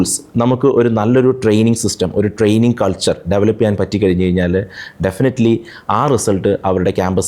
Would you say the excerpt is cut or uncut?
uncut